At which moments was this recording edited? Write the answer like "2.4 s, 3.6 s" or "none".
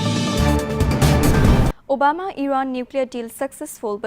1.7 s